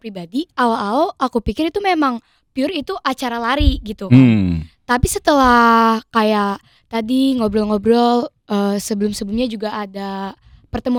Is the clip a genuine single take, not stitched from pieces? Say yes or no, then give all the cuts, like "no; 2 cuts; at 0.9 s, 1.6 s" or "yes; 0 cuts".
yes; 0 cuts